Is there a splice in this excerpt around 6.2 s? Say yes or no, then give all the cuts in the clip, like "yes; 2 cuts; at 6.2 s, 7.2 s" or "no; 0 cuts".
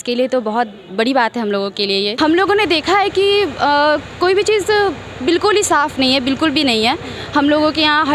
no; 1 cut; at 2.1 s